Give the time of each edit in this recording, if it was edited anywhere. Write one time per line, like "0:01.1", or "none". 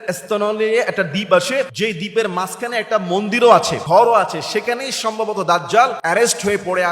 0:01.7
0:03.8
0:06.0